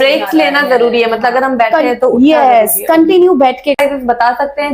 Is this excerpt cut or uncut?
cut